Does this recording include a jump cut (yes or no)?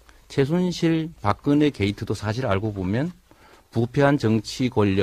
yes